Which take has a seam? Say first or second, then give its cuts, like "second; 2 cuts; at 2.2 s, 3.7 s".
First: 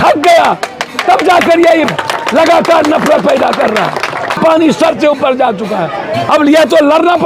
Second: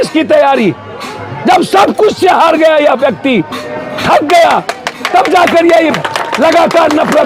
first; 1 cut; at 4.4 s